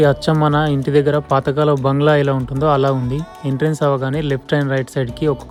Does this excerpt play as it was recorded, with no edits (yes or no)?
yes